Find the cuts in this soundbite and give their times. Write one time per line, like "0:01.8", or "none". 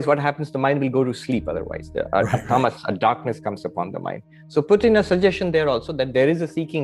none